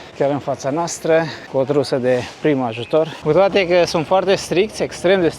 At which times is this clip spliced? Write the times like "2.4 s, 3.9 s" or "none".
3.1 s

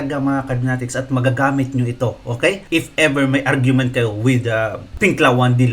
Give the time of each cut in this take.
2.6 s, 4.9 s

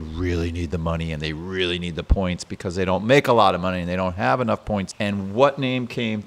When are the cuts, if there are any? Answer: 4.9 s

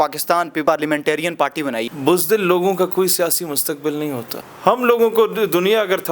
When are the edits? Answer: 1.8 s, 4.4 s

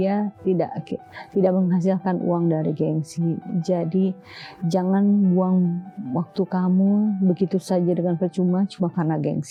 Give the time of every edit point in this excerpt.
none

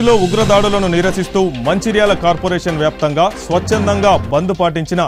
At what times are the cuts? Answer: none

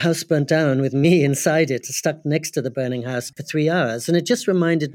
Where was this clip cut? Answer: 3.3 s

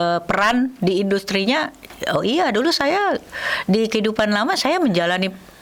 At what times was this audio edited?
none

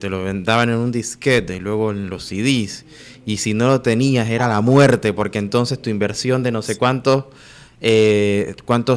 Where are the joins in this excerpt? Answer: none

